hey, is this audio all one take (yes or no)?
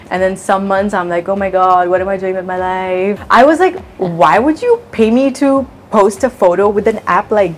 no